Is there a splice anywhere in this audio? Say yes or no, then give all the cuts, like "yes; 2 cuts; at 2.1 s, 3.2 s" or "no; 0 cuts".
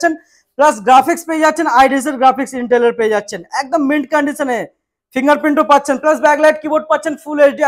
no; 0 cuts